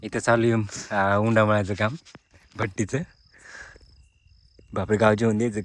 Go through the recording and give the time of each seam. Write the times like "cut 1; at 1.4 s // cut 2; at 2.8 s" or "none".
none